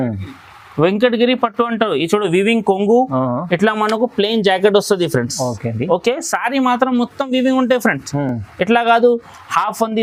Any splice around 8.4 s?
no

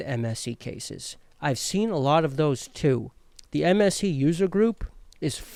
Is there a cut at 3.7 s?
no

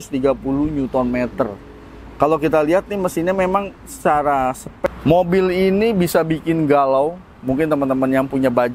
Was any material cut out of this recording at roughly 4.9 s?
yes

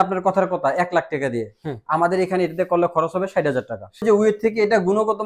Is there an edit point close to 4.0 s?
yes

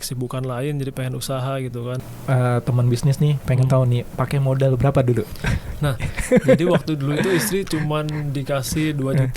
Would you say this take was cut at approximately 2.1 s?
yes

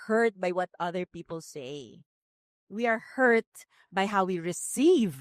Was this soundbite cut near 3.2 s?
no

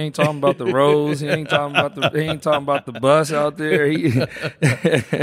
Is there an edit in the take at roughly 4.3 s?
no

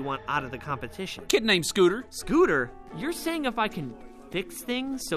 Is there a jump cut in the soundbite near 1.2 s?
yes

